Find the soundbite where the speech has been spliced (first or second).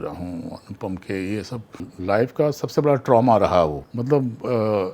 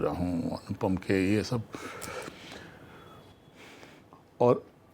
first